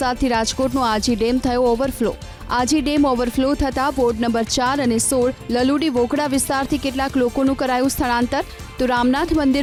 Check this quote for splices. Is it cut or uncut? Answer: uncut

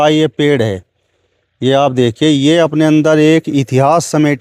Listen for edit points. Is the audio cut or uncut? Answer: uncut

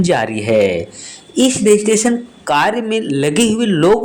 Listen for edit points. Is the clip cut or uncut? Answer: uncut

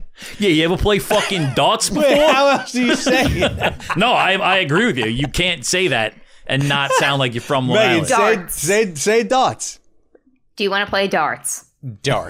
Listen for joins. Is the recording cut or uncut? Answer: uncut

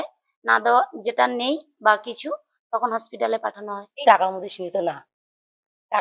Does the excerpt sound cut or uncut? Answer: cut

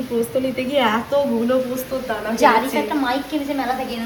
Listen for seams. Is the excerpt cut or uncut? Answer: uncut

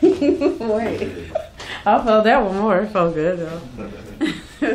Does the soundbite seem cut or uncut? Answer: uncut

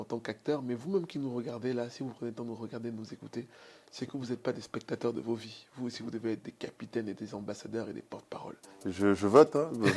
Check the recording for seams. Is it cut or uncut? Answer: cut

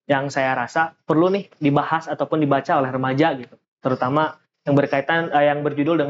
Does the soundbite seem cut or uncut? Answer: uncut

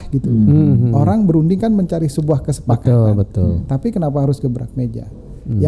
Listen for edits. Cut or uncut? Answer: uncut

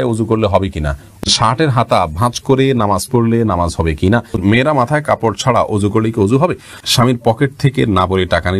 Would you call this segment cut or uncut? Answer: cut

